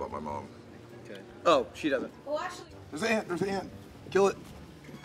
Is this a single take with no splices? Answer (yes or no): no